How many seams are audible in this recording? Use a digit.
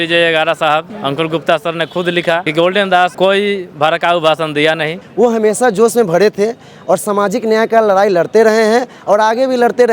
4